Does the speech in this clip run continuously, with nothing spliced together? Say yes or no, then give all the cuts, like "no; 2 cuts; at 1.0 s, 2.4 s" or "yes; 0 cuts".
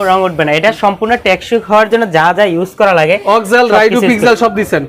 yes; 0 cuts